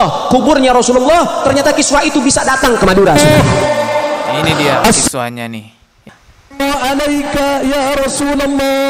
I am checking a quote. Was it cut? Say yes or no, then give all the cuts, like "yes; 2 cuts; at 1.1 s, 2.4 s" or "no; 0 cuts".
yes; 1 cut; at 6.1 s